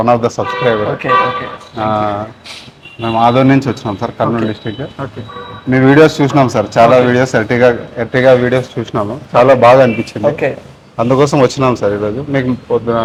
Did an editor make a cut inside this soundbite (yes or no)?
no